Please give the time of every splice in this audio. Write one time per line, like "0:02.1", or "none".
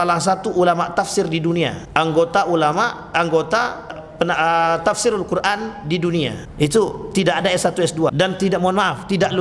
0:01.8
0:04.0
0:06.4
0:08.1